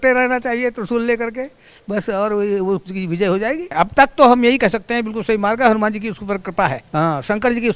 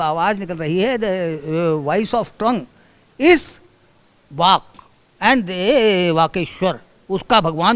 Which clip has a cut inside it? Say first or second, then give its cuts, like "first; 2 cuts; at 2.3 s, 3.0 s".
first; 2 cuts; at 3.7 s, 6.8 s